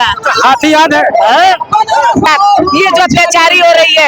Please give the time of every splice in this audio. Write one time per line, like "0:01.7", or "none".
0:02.2